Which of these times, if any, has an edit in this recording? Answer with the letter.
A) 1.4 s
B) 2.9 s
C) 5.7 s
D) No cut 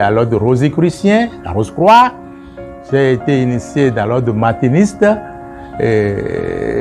D